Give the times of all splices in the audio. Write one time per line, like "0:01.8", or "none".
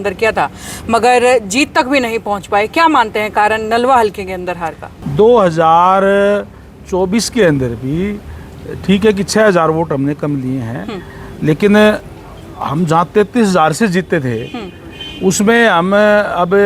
0:04.9